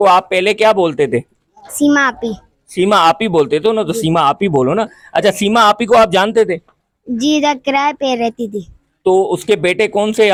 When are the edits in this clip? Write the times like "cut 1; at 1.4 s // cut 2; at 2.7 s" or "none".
none